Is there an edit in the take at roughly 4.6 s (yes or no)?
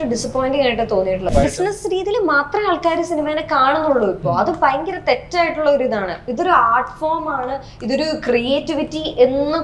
no